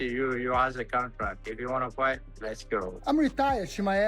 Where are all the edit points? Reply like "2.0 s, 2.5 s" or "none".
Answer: 2.9 s